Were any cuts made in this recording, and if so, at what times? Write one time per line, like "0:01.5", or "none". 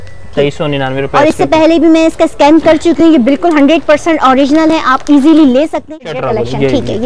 0:05.8